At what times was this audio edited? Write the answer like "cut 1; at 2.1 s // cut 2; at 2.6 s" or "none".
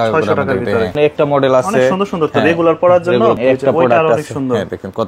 cut 1; at 0.9 s // cut 2; at 3.4 s